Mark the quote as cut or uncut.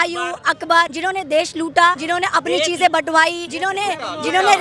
cut